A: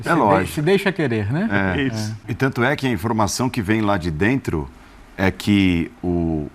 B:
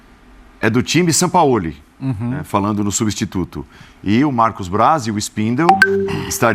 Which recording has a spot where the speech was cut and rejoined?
A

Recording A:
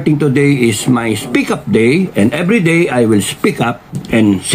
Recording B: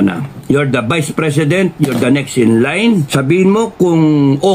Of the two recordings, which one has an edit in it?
B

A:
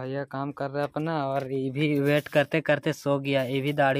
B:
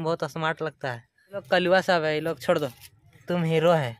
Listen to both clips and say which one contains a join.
B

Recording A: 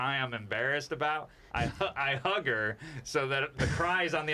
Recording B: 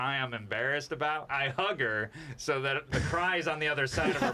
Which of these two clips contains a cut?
B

